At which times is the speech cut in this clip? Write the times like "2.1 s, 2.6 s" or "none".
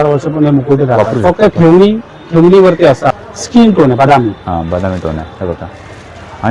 3.1 s